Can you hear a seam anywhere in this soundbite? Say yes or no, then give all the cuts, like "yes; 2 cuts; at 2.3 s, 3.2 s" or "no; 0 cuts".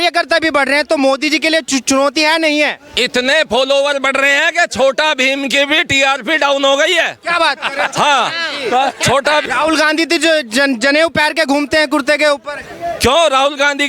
yes; 1 cut; at 9.4 s